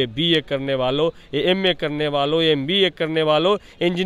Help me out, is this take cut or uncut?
uncut